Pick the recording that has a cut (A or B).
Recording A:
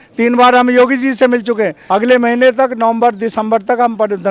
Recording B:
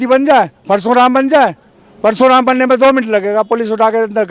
A